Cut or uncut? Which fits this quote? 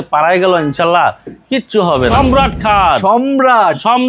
cut